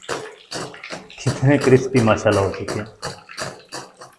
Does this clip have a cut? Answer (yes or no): no